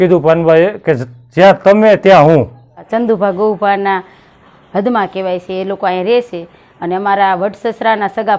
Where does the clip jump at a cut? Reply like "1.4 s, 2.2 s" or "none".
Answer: 2.9 s